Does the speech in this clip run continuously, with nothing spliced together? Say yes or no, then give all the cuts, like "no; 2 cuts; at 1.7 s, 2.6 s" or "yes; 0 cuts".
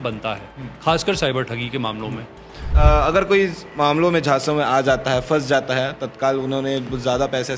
no; 1 cut; at 2.7 s